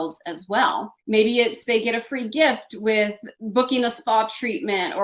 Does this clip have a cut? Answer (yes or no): no